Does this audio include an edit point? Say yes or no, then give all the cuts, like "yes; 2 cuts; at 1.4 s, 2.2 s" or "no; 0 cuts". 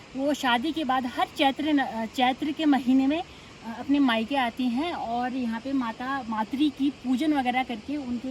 no; 0 cuts